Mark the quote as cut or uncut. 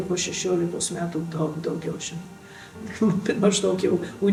uncut